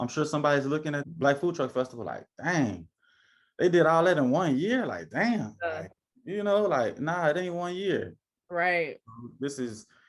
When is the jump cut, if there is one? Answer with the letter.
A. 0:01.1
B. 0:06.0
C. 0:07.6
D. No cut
A